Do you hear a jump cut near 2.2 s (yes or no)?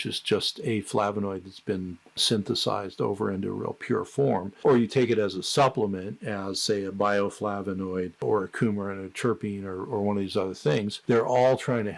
yes